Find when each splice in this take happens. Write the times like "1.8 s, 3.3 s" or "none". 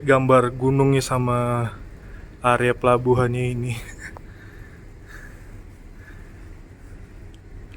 none